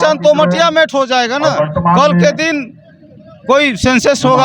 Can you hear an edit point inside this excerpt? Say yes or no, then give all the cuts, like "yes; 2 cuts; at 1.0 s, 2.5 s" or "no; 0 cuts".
no; 0 cuts